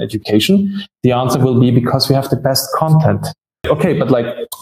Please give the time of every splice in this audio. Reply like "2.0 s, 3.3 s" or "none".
3.6 s